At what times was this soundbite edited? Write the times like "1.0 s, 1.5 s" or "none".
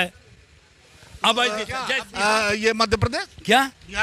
2.0 s